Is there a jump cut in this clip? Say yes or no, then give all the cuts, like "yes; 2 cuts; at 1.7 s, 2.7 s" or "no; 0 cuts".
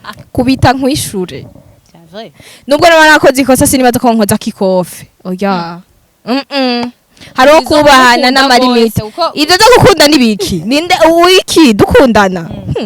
no; 0 cuts